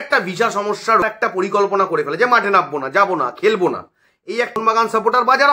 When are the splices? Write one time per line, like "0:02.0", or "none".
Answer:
0:01.0
0:04.6